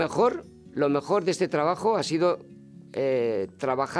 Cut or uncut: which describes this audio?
uncut